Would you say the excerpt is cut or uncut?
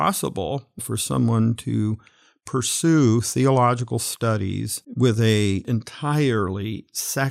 cut